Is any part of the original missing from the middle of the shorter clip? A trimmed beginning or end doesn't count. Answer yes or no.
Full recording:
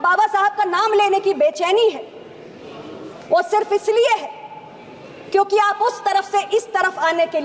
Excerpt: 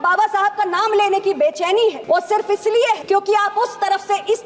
yes